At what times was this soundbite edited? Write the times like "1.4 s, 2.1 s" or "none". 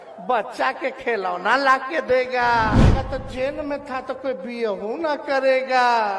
3.0 s